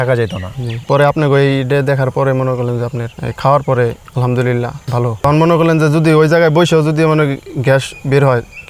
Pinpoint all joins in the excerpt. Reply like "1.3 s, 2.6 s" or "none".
5.2 s

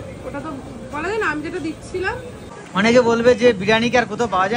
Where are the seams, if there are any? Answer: 2.6 s

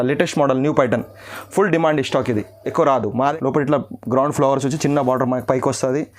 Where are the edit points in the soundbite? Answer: 3.1 s

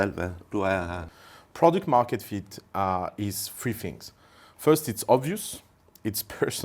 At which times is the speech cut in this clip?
1.0 s

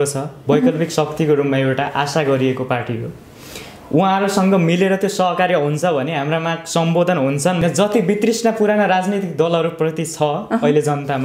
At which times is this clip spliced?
7.6 s

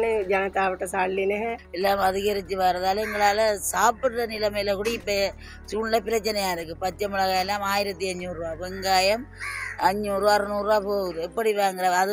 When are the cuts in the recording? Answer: 1.6 s

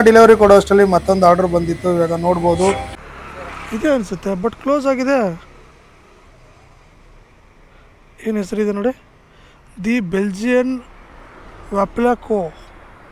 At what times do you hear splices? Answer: 2.9 s

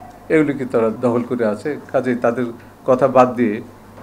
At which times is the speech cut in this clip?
0.9 s

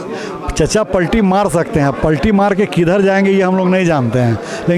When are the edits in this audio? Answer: none

